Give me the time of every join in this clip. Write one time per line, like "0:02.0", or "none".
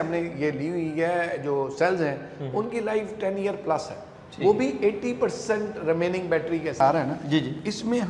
0:06.8

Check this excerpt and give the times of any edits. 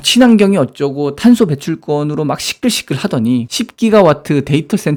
none

